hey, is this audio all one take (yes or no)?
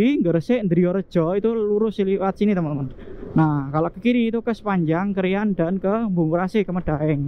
yes